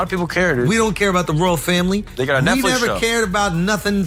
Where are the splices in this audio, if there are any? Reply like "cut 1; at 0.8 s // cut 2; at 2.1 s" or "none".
none